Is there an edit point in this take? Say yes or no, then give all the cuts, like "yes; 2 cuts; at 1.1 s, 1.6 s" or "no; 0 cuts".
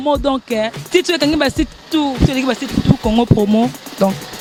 no; 0 cuts